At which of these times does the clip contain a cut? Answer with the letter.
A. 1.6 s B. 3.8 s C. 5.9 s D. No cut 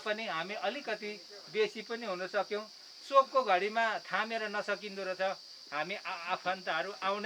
D